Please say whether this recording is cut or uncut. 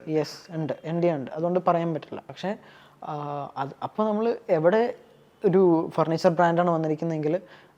cut